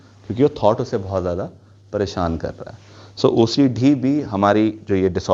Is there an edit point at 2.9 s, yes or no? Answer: no